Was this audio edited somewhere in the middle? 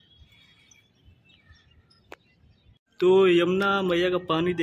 yes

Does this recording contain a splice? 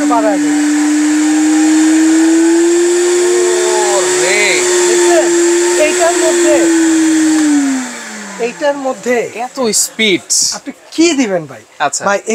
no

